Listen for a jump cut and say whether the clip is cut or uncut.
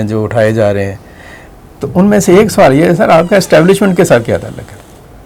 uncut